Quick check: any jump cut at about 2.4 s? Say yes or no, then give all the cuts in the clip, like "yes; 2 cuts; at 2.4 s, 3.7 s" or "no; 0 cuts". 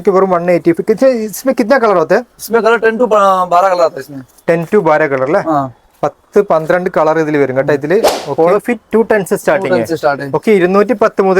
no; 1 cut; at 8.2 s